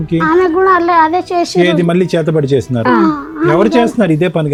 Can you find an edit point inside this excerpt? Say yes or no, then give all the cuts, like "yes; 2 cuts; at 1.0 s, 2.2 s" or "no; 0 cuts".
no; 0 cuts